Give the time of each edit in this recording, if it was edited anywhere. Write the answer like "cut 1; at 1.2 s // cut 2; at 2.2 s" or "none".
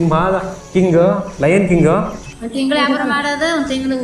cut 1; at 2.2 s